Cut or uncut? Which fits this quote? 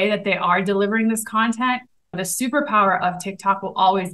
uncut